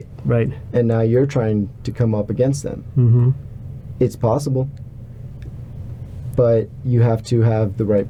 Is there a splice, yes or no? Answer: no